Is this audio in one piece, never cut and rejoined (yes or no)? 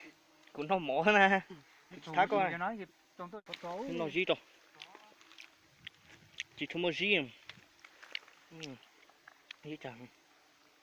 no